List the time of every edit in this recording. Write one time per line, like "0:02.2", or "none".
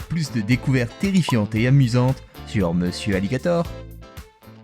0:03.7